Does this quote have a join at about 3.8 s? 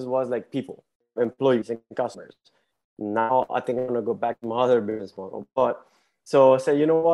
no; 1 cut; at 1.0 s

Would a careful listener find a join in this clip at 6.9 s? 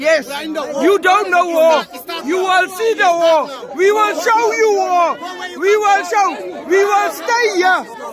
no; 0 cuts

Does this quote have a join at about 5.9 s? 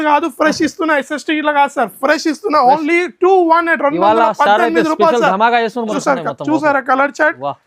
yes; 1 cut; at 5.9 s

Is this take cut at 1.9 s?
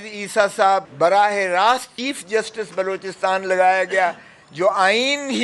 yes; 2 cuts; at 0.9 s, 1.9 s

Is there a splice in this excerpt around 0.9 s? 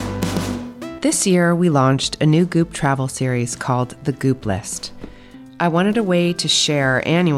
yes; 1 cut; at 0.9 s

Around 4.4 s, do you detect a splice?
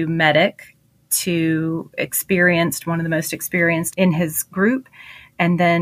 yes; 1 cut; at 4.4 s

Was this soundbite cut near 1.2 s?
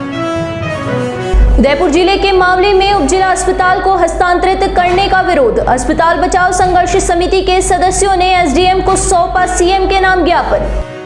yes; 1 cut; at 1.2 s

